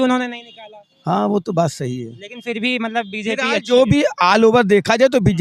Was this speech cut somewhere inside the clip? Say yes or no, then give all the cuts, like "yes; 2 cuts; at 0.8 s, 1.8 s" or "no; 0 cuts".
no; 0 cuts